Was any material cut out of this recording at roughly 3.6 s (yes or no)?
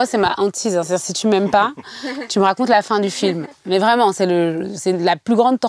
no